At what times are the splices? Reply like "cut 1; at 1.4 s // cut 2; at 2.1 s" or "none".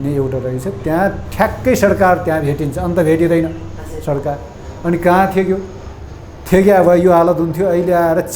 none